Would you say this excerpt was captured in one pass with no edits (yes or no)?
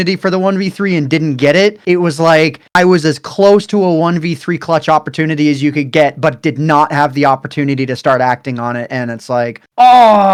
yes